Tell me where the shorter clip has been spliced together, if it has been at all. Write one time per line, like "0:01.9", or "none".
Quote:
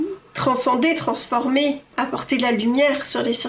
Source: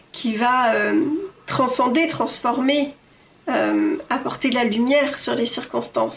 0:01.9